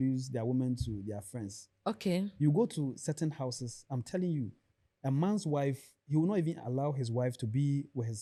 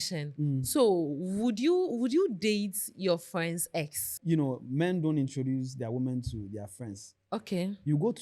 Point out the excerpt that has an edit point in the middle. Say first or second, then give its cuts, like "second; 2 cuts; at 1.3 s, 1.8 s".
second; 1 cut; at 4.1 s